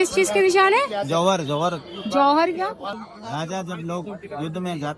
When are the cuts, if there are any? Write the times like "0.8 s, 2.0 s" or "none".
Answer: 3.0 s